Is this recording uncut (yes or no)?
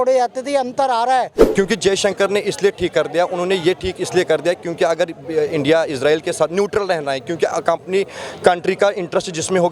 no